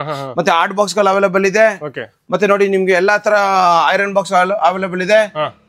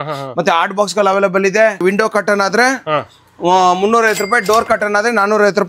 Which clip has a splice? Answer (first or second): second